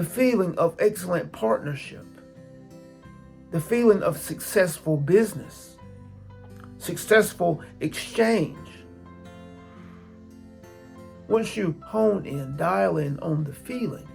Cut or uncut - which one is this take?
cut